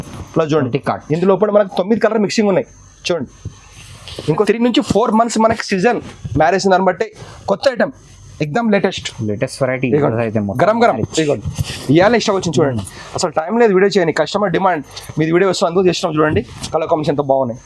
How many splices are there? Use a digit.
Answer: 1